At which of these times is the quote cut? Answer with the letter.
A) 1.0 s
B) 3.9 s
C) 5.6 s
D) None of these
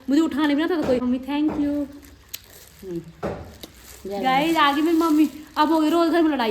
A